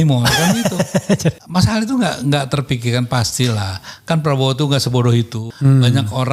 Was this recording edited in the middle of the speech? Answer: yes; 2 cuts; at 1.4 s, 5.4 s

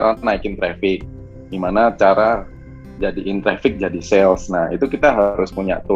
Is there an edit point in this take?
no; 0 cuts

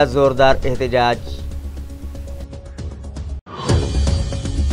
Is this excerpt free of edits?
no; 2 cuts; at 1.3 s, 3.4 s

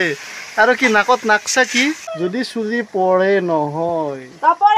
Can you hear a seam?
yes; 1 cut; at 2.0 s

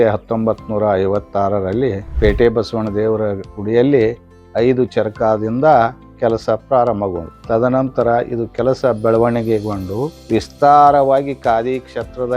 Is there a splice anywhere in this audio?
yes; 3 cuts; at 2.1 s, 7.3 s, 10.1 s

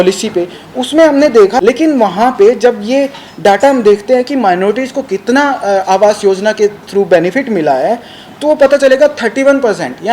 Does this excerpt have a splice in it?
yes; 1 cut; at 1.5 s

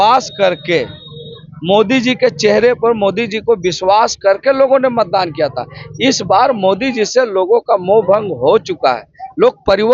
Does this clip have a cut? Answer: no; 0 cuts

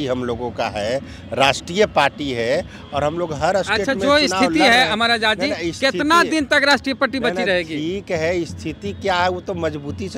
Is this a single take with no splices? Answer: yes; 0 cuts

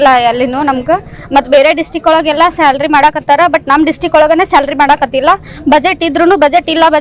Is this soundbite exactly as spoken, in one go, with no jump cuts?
yes; 0 cuts

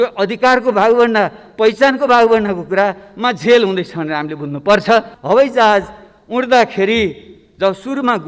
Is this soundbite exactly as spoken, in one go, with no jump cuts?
no; 1 cut; at 5.1 s

